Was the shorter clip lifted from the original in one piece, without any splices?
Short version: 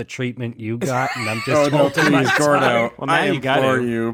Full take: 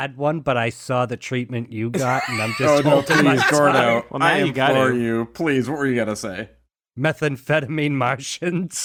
yes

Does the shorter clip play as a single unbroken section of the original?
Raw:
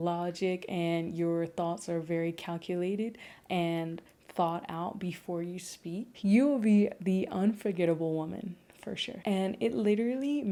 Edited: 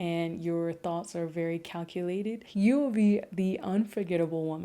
no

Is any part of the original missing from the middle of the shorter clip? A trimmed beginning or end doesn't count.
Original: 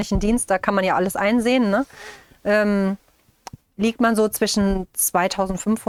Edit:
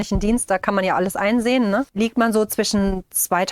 yes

